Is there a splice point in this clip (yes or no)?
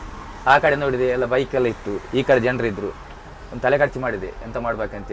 no